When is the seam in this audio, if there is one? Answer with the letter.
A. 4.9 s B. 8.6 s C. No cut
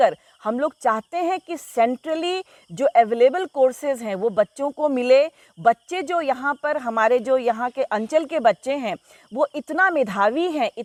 C